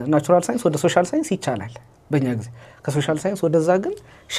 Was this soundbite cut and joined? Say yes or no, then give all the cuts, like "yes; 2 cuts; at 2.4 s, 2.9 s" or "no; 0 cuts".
no; 0 cuts